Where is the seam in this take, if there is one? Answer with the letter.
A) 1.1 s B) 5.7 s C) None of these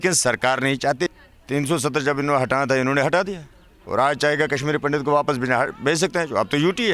A